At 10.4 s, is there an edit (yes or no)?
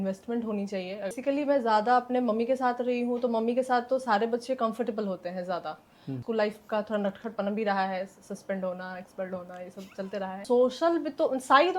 yes